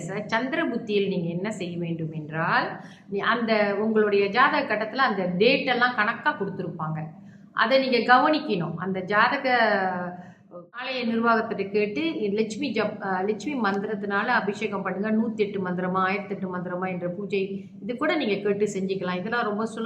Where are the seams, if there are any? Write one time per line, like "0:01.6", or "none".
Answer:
0:10.9